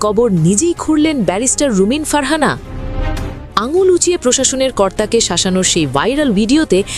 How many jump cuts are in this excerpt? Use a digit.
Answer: 0